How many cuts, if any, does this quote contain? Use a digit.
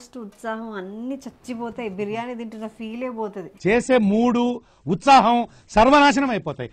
0